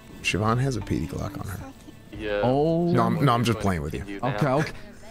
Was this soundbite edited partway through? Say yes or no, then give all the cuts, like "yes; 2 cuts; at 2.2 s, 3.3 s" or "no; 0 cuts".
yes; 1 cut; at 2.1 s